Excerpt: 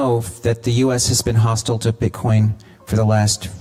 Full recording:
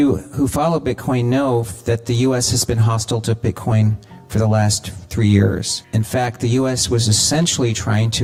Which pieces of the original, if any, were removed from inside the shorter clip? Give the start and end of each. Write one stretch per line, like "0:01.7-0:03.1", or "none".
none